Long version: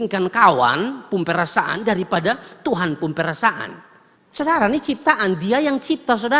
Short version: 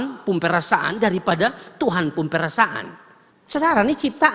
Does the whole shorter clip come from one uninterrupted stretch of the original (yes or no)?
yes